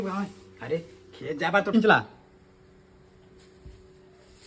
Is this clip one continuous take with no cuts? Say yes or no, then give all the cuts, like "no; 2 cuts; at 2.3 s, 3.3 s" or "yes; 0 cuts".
no; 1 cut; at 1.7 s